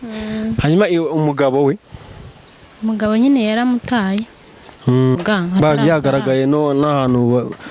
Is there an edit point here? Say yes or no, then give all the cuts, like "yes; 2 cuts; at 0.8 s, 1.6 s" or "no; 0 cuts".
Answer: yes; 1 cut; at 5.2 s